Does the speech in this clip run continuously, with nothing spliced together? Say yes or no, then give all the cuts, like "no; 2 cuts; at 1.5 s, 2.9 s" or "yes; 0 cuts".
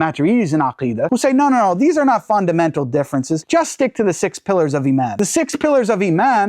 no; 2 cuts; at 1.1 s, 3.4 s